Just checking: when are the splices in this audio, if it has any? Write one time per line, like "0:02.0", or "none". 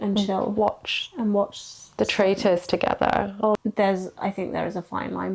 0:03.5